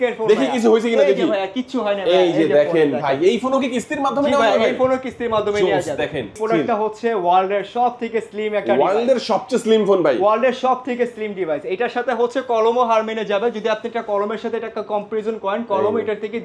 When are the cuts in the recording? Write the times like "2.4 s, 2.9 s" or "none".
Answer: 6.4 s